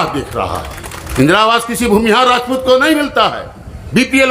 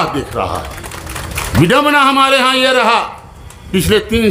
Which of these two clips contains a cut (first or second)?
first